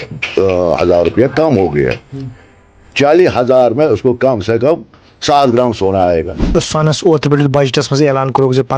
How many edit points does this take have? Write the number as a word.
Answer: one